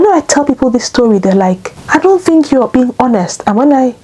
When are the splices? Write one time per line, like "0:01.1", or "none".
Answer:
0:01.7